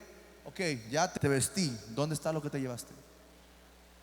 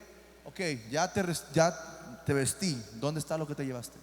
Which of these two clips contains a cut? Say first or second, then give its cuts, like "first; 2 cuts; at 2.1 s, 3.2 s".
first; 1 cut; at 1.1 s